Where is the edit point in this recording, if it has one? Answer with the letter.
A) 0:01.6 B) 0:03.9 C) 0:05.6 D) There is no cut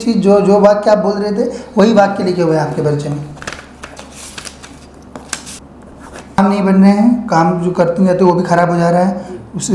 C